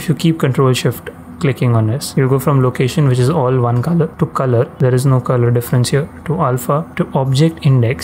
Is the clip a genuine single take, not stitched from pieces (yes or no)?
no